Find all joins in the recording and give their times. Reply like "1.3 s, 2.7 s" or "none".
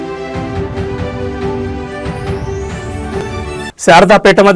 none